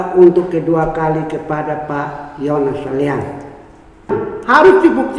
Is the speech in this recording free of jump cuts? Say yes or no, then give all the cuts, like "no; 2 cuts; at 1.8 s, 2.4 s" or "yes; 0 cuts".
no; 1 cut; at 4.3 s